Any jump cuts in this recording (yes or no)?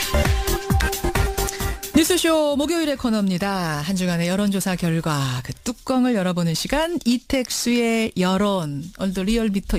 no